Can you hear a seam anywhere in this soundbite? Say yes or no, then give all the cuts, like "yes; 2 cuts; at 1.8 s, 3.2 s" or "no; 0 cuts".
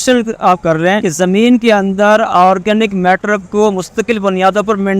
yes; 1 cut; at 1.1 s